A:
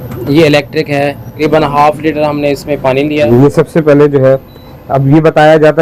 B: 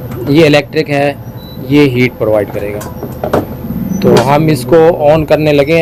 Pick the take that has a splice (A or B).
A